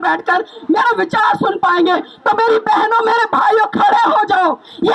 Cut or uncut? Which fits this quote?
uncut